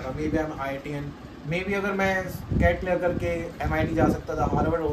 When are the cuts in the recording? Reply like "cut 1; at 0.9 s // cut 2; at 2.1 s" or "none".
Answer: none